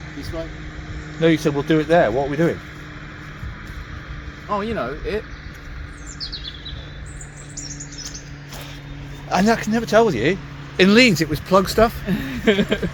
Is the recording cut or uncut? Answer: uncut